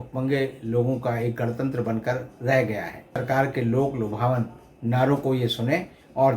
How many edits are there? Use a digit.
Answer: 1